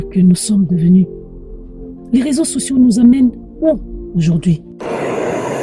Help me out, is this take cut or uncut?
cut